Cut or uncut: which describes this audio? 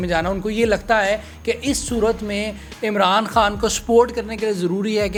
uncut